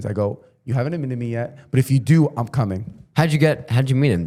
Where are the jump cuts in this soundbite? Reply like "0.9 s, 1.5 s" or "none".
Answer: none